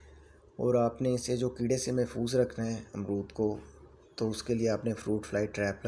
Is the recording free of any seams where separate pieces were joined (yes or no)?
yes